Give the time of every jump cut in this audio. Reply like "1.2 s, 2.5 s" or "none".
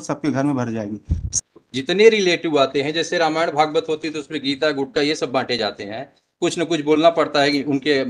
1.2 s

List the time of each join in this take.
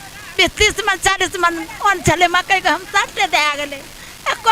none

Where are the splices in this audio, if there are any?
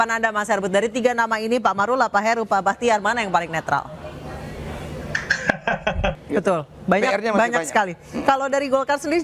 6.2 s

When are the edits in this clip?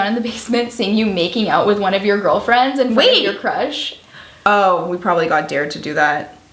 none

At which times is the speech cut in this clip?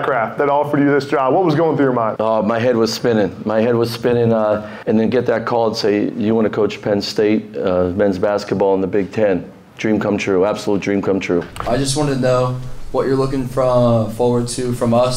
2.1 s, 4.7 s, 11.6 s

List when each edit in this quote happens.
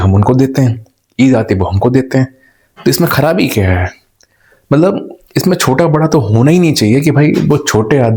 none

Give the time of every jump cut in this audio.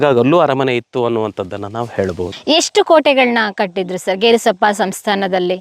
none

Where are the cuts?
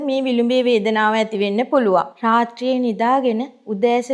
2.1 s

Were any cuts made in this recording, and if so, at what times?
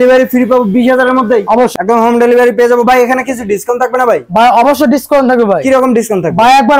1.7 s

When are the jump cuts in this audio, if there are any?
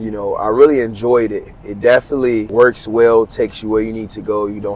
none

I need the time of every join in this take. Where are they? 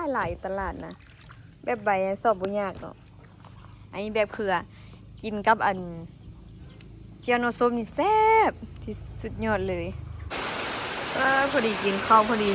10.3 s

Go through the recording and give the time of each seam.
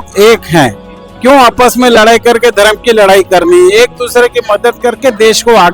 none

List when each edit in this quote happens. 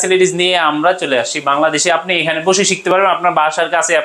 none

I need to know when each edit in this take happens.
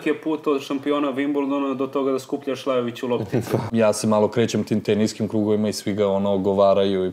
3.7 s

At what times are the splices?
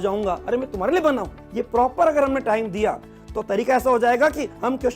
1.4 s

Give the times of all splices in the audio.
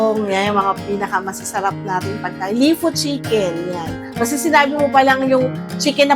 none

